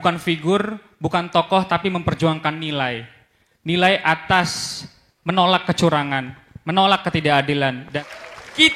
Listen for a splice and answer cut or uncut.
cut